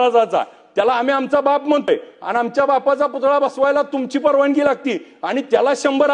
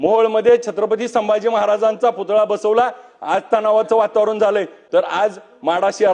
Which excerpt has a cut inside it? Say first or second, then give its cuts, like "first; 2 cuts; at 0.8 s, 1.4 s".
second; 1 cut; at 4.8 s